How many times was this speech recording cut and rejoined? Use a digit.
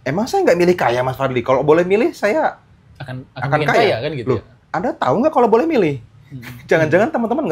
0